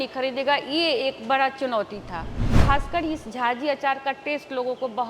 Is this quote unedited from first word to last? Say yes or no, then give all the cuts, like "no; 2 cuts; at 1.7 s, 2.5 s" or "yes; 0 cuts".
no; 1 cut; at 2.6 s